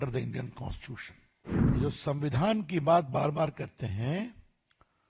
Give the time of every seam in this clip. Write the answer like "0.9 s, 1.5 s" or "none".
1.8 s